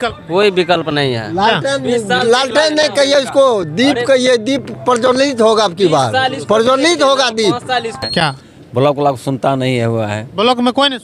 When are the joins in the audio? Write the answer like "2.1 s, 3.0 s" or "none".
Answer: 8.0 s